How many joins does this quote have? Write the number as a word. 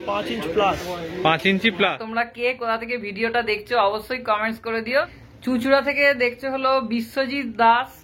two